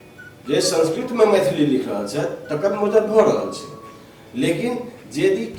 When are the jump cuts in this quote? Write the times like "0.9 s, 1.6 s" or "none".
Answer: none

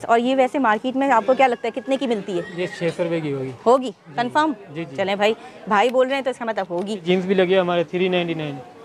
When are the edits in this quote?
7.0 s

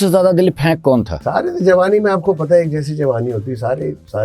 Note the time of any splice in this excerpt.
1.2 s

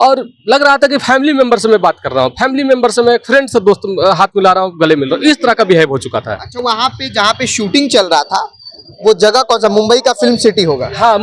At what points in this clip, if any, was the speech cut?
none

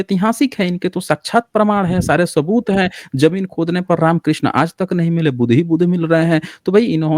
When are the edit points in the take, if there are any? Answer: none

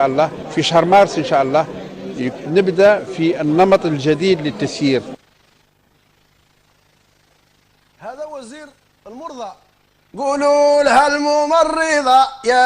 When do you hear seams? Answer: 1.7 s

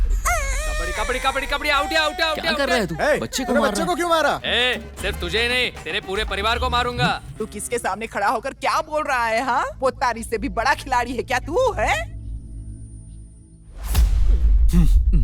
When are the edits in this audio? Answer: 4.4 s, 7.3 s

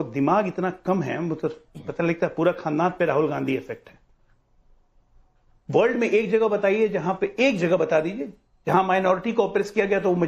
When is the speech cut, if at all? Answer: 5.5 s

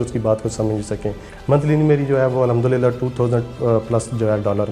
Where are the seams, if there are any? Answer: 1.3 s

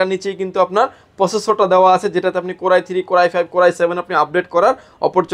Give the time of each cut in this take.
none

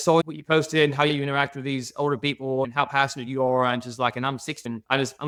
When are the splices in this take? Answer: none

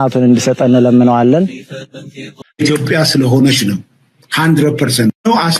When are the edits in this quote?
2.5 s

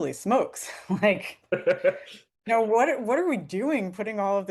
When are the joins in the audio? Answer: none

